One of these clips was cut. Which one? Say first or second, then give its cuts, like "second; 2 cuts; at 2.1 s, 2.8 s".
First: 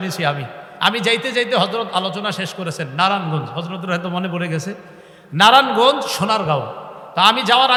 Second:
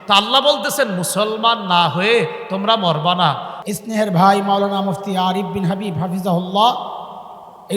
second; 1 cut; at 3.5 s